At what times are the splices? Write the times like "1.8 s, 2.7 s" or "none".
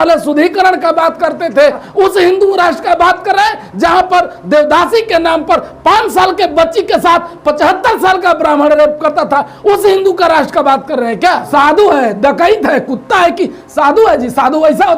1.8 s, 11.5 s